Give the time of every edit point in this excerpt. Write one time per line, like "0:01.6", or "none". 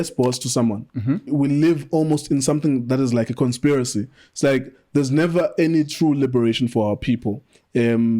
0:01.3

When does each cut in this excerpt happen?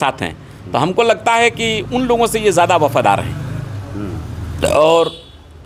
none

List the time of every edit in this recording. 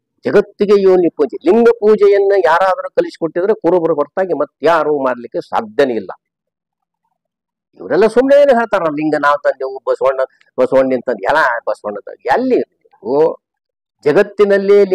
none

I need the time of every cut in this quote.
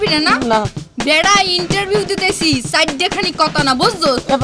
none

